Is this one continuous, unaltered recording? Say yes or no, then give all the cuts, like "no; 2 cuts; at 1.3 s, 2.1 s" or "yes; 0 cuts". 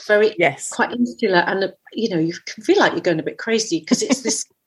yes; 0 cuts